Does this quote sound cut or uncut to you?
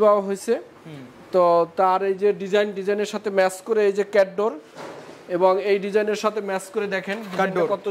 uncut